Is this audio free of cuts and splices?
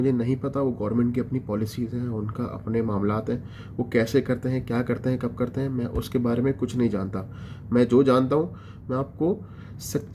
yes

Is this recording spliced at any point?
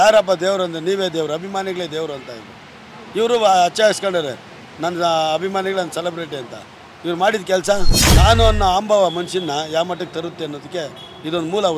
yes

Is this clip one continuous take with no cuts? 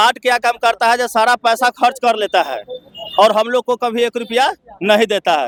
yes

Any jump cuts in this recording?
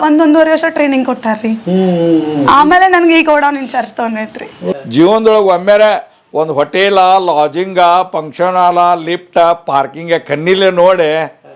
yes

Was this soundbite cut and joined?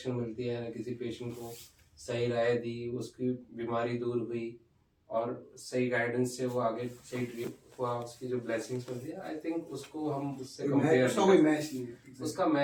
no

